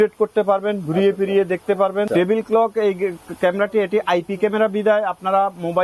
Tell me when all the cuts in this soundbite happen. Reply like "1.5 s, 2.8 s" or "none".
2.1 s